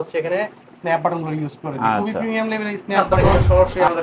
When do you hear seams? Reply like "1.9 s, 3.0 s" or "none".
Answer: 2.9 s